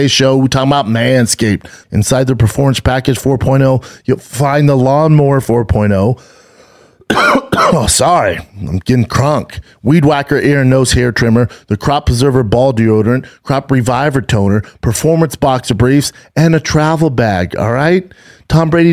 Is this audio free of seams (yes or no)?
no